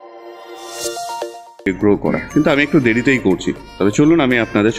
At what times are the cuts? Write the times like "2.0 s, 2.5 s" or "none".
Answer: 1.7 s